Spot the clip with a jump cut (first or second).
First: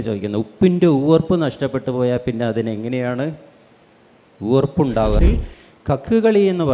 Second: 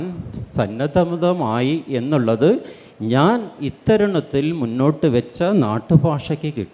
first